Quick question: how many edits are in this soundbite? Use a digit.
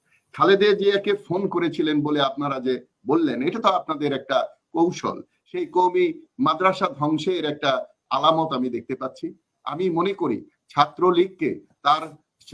1